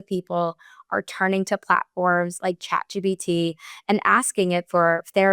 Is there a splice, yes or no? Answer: no